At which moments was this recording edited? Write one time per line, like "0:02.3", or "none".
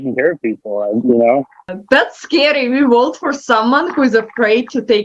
0:01.0
0:01.7